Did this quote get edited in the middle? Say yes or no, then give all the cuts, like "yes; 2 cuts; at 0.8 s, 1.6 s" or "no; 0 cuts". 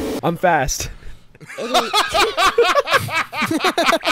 no; 0 cuts